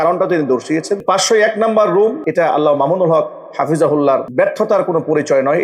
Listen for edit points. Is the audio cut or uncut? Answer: cut